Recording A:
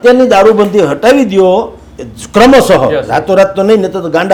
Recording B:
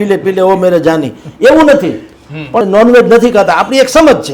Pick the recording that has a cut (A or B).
B